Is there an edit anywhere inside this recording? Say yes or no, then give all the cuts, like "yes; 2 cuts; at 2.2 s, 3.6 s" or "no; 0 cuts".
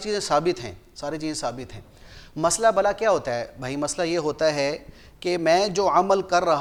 no; 0 cuts